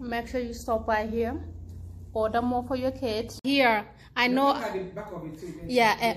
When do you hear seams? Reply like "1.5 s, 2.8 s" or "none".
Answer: 3.4 s